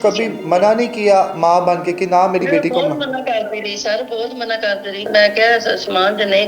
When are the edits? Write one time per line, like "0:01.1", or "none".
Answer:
0:05.1